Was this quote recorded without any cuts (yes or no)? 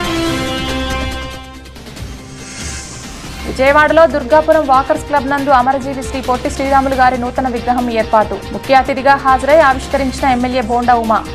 yes